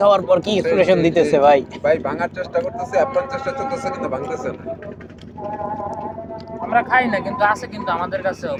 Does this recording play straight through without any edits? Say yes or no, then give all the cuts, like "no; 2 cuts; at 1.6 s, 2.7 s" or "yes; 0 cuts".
yes; 0 cuts